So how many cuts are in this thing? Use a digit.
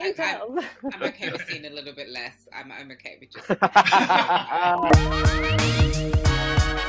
1